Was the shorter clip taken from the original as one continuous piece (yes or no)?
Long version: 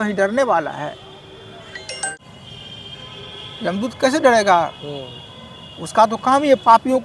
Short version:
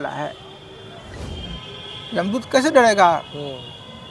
no